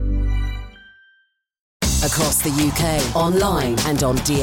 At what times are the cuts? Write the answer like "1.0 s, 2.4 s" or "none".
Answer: 1.7 s